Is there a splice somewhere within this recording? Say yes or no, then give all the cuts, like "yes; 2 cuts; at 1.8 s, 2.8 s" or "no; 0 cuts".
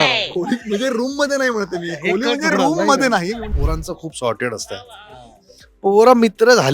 yes; 1 cut; at 3.5 s